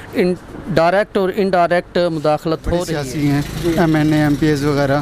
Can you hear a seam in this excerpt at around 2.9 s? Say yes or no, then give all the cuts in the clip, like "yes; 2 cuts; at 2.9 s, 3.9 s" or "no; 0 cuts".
yes; 1 cut; at 2.9 s